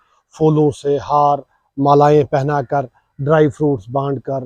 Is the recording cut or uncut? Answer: uncut